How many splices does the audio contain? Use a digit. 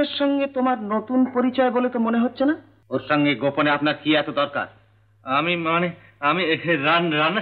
1